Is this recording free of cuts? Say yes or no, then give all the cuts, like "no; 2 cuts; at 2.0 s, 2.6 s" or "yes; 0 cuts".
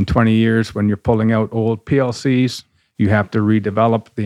yes; 0 cuts